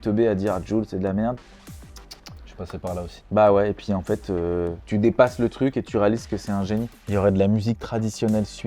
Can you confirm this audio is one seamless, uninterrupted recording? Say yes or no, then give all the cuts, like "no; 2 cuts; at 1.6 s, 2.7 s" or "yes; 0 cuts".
no; 1 cut; at 7.0 s